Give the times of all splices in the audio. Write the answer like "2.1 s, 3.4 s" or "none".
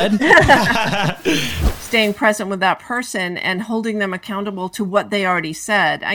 1.5 s